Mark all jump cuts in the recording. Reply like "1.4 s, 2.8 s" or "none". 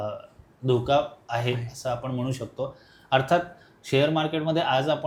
none

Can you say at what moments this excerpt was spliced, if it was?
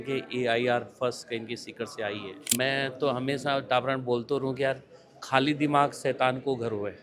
2.5 s

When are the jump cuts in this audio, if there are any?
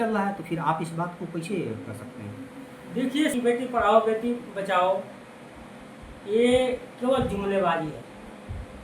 3.3 s

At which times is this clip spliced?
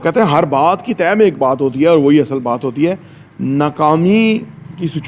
none

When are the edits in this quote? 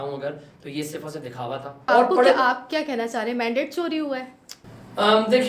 1.9 s

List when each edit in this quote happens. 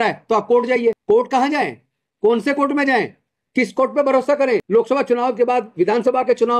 1.0 s, 4.7 s

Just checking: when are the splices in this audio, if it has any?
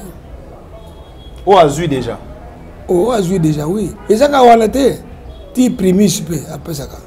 3.9 s

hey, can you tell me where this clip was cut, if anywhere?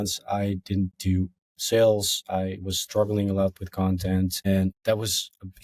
1.5 s, 4.5 s

